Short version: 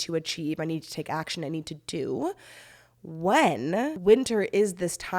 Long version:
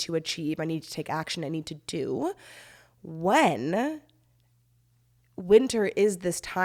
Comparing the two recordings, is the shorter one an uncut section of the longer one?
no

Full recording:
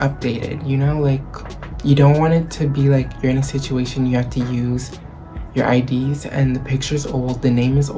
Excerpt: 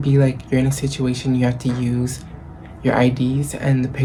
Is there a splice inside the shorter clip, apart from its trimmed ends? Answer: no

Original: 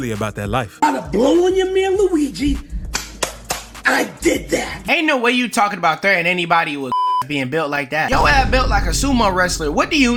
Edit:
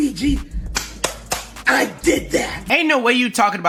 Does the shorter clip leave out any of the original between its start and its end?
no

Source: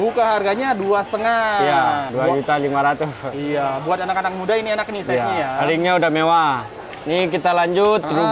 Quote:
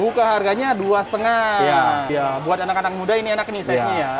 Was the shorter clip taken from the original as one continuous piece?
no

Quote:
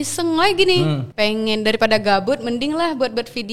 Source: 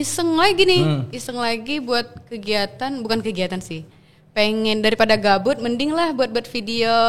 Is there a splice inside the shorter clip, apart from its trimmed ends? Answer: yes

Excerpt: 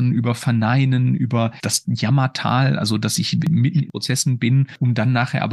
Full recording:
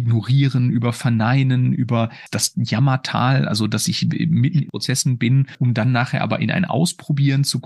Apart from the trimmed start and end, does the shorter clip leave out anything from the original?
yes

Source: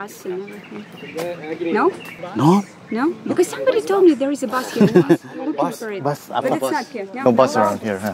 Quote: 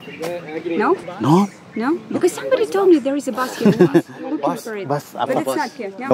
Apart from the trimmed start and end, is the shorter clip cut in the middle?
yes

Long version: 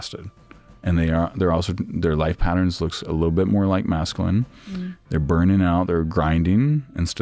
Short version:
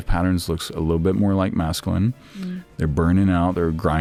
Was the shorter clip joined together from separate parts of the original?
no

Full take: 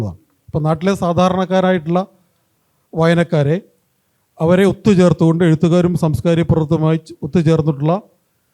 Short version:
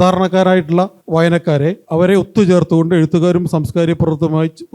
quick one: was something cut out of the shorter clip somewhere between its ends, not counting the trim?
yes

